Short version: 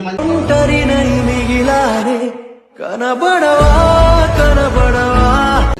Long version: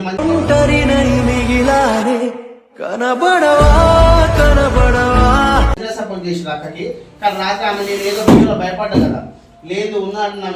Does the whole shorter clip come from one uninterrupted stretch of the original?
yes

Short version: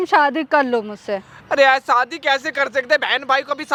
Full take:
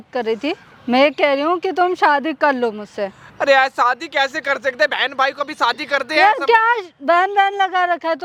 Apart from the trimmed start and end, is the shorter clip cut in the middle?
no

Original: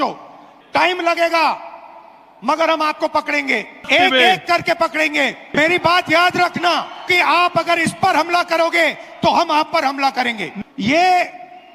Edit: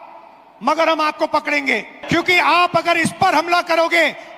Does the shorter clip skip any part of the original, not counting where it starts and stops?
yes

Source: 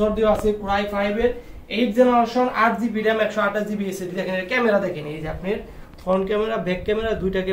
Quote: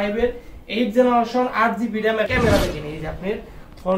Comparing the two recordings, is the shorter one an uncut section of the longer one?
no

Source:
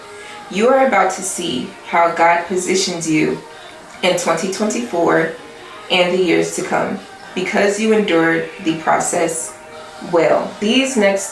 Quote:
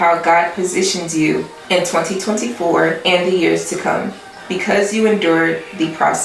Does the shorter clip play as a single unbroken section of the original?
no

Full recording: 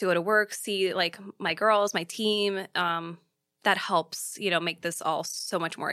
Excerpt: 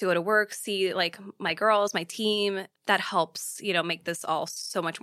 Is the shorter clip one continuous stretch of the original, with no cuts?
no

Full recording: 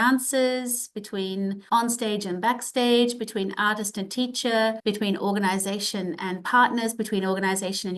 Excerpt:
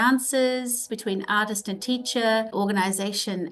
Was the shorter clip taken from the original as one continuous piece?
no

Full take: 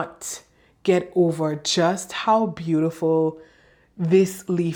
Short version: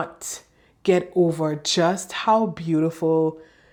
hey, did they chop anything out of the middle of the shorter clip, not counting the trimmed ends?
no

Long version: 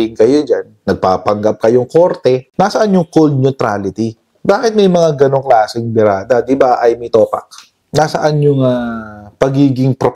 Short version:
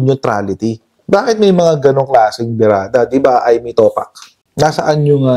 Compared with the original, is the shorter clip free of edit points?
yes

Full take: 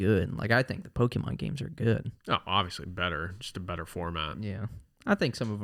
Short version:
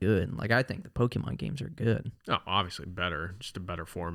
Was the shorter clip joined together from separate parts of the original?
no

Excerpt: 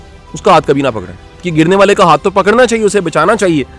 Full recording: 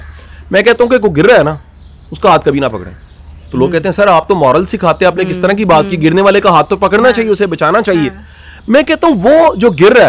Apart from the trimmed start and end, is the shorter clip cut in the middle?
yes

